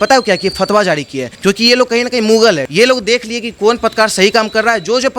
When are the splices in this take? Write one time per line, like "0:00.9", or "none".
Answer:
0:01.3
0:02.6